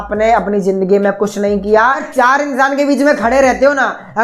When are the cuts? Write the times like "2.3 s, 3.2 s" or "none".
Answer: 2.0 s